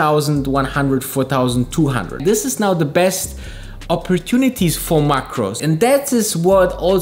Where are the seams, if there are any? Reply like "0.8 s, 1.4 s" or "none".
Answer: 2.2 s, 5.6 s